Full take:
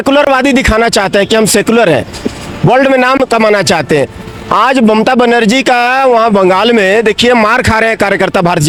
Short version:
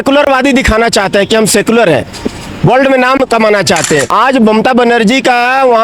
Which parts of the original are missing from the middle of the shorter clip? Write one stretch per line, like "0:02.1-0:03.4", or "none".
0:04.1-0:04.5